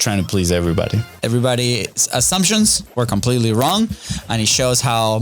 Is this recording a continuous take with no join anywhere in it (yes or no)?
no